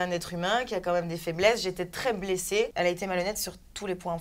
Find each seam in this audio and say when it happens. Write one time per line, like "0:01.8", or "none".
0:02.7